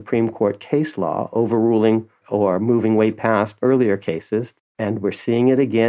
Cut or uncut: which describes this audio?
cut